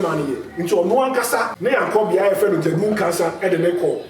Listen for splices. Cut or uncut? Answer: cut